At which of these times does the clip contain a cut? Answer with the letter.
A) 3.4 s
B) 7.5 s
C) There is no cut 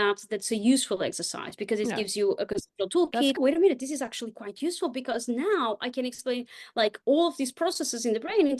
A